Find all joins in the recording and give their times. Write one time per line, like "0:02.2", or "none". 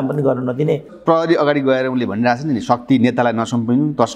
0:00.9